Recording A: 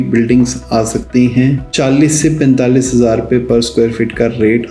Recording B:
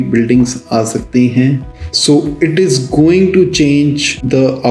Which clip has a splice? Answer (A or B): B